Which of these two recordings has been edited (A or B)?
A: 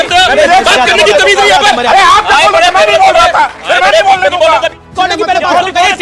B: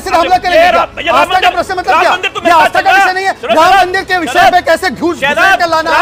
A